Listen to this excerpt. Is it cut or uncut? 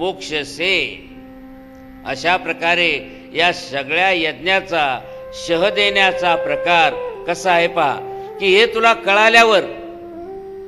uncut